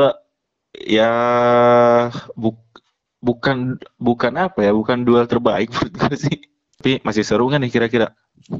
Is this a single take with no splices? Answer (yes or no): no